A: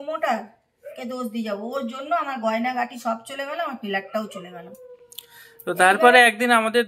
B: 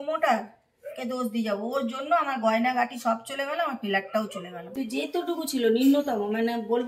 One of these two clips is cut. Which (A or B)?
B